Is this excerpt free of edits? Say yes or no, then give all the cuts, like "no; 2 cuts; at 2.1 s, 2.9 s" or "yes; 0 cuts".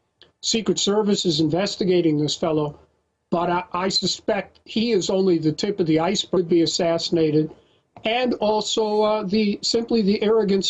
yes; 0 cuts